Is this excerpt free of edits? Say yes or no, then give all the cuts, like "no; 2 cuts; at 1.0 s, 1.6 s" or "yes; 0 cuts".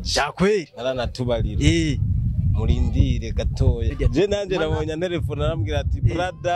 no; 1 cut; at 3.9 s